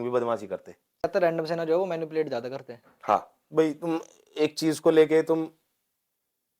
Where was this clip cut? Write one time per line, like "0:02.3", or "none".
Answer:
0:01.0